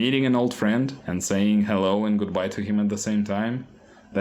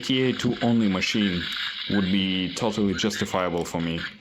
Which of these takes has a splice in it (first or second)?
first